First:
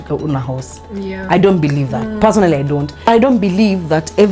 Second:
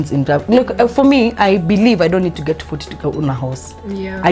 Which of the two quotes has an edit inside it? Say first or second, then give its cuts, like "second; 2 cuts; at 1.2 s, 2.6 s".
first; 1 cut; at 3.1 s